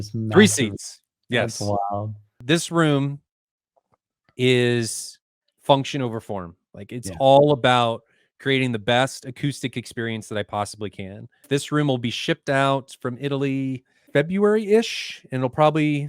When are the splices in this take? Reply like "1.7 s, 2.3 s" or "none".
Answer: 2.4 s, 11.4 s, 13.9 s